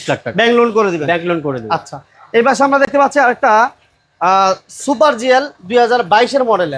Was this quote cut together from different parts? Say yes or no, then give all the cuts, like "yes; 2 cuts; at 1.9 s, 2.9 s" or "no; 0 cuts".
no; 0 cuts